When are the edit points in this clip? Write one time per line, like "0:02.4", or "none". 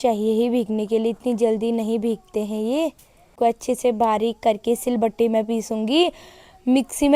0:03.3